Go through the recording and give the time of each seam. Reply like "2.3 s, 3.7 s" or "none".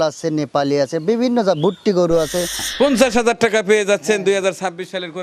2.7 s